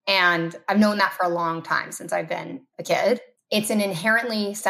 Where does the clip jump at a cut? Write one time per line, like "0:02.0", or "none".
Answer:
0:03.3